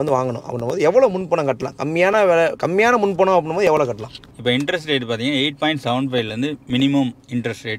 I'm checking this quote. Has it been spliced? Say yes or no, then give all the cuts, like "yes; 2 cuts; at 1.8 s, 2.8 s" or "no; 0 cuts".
yes; 1 cut; at 4.3 s